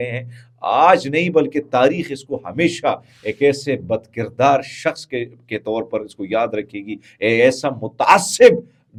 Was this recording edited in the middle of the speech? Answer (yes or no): no